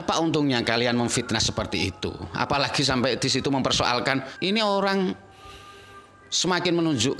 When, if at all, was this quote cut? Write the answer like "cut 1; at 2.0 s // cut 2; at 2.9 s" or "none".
cut 1; at 4.3 s